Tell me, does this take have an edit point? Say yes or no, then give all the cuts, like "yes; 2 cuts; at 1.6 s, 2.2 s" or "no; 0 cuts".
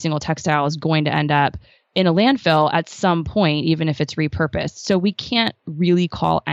no; 0 cuts